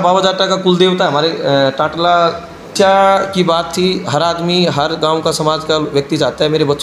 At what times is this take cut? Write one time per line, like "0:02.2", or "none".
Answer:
0:02.7